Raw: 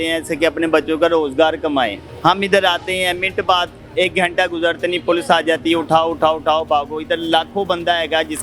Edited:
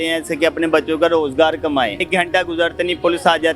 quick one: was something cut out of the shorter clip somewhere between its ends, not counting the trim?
yes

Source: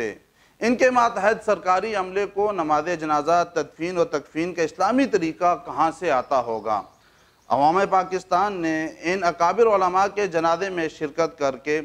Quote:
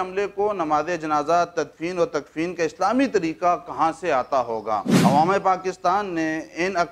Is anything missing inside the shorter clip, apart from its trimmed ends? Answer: yes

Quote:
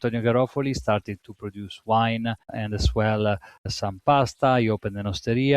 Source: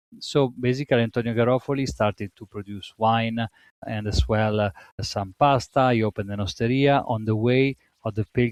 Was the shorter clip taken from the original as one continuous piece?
no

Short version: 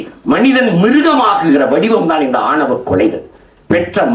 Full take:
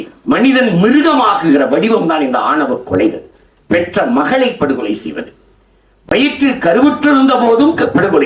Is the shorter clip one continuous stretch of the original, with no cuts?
yes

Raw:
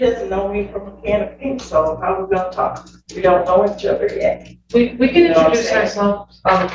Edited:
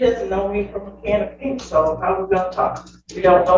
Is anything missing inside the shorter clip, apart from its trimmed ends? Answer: no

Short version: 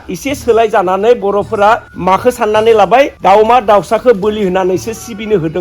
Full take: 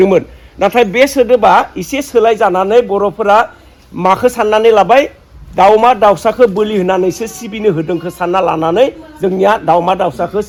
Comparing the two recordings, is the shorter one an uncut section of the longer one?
no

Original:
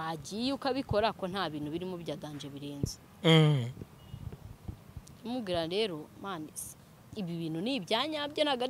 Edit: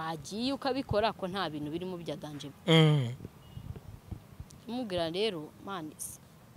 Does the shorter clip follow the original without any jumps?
no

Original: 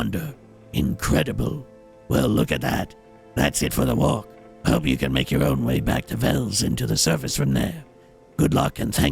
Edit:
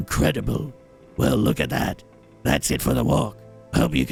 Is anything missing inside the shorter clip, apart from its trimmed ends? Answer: no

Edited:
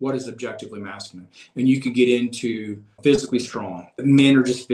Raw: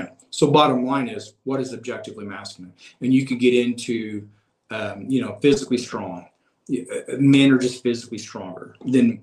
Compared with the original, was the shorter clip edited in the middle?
yes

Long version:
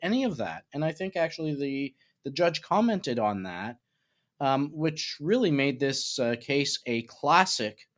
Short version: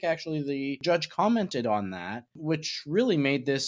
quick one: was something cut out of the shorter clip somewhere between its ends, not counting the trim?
yes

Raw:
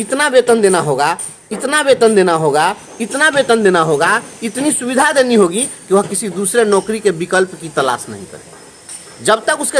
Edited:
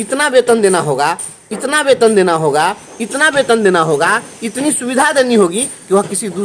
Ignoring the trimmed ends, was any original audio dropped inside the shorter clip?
no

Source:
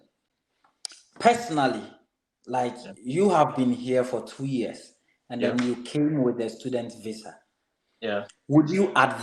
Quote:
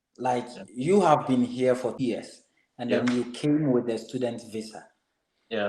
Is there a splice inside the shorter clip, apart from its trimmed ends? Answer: yes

